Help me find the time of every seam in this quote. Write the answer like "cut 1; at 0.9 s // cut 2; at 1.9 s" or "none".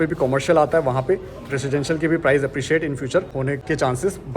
cut 1; at 3.5 s